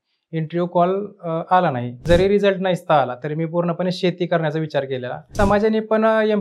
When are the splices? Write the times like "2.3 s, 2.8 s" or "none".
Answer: 2.0 s, 5.3 s

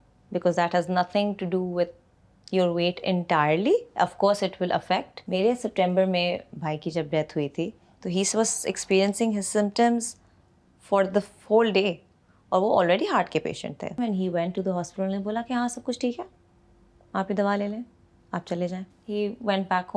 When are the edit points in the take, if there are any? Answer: 5.2 s, 14.0 s, 18.9 s

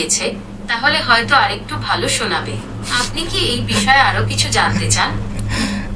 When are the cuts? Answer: none

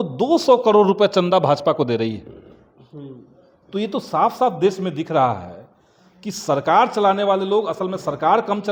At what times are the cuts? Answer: none

